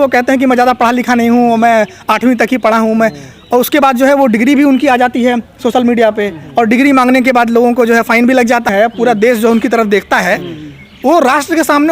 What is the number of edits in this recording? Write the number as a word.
one